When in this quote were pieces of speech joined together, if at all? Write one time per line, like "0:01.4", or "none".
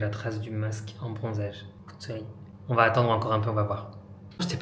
none